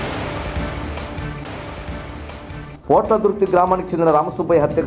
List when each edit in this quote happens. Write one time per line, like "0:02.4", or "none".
0:01.4

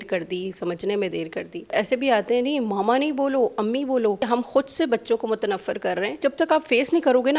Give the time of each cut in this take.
0:01.7
0:04.2
0:06.2

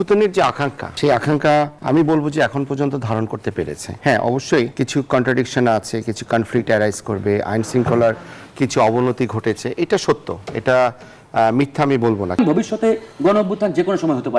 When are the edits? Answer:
0:00.9
0:01.8
0:03.8
0:04.7
0:12.4

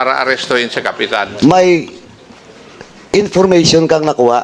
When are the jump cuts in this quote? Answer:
0:01.2

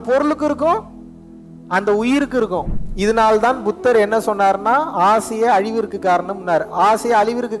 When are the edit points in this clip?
0:02.7

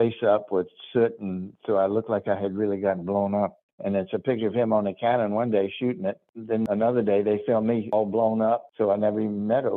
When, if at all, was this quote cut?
0:03.6
0:06.6
0:07.9
0:08.7

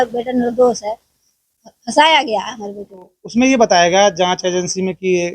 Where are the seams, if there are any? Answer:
0:03.2

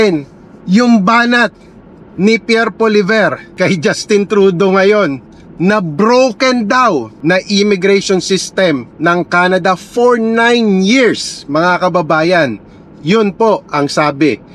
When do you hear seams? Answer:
0:03.4
0:07.1

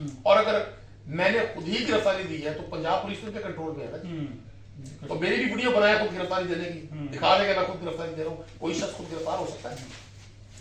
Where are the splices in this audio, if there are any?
none

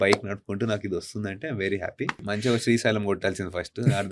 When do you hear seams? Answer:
0:02.3

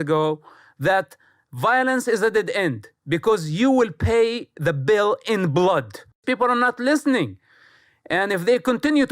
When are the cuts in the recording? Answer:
0:06.2

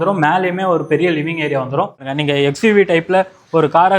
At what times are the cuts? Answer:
0:02.1

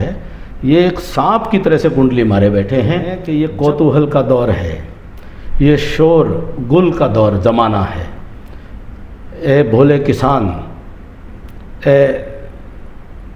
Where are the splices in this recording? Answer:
0:03.2

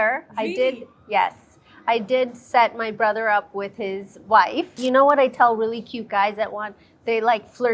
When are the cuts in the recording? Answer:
0:04.8

